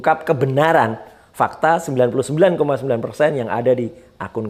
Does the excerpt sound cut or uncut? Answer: uncut